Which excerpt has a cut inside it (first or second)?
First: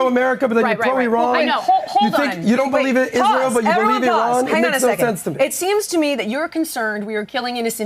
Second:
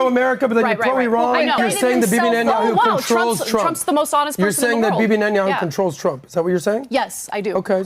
second